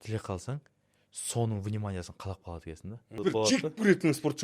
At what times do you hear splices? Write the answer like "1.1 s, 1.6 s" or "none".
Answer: 3.1 s